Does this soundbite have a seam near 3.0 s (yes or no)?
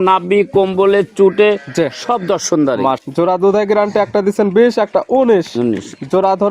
yes